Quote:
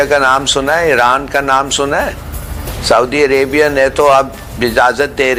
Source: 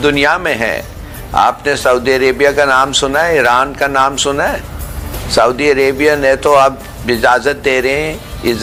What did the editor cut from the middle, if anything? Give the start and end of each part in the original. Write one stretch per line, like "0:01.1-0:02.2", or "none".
none